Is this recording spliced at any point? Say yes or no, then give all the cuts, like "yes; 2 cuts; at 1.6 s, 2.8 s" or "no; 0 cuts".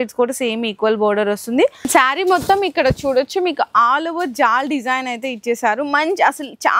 yes; 1 cut; at 1.9 s